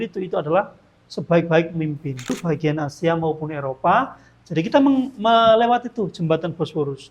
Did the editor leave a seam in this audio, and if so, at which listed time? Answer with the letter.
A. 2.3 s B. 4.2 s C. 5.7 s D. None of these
A